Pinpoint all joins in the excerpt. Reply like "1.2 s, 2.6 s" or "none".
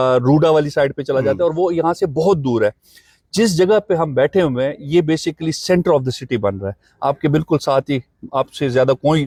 none